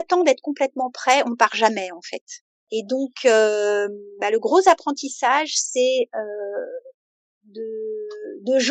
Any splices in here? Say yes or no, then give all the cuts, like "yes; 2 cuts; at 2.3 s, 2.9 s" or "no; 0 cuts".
no; 0 cuts